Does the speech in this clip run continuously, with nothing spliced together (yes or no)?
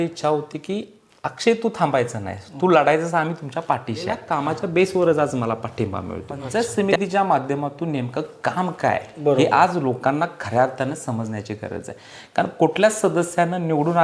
no